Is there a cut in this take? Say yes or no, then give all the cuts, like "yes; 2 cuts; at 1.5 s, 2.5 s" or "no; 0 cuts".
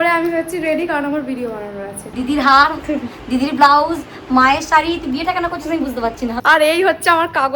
yes; 2 cuts; at 1.9 s, 6.4 s